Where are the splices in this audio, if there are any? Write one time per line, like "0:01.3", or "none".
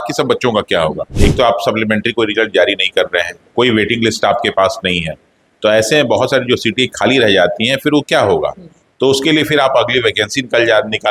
0:01.1